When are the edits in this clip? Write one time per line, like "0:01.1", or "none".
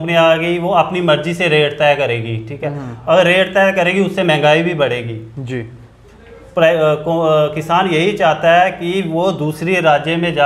none

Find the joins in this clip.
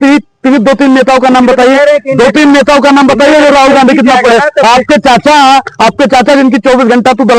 none

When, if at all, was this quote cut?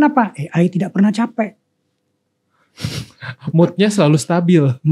none

